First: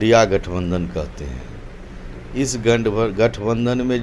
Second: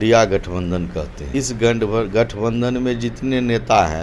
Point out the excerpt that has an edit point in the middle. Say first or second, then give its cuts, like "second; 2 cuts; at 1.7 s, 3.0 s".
second; 1 cut; at 1.2 s